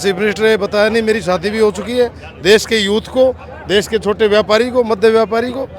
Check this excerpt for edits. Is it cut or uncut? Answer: uncut